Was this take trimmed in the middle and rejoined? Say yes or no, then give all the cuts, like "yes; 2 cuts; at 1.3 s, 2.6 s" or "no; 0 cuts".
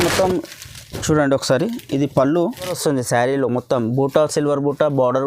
yes; 1 cut; at 2.8 s